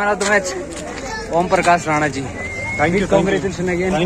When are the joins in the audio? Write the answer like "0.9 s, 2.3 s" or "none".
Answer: none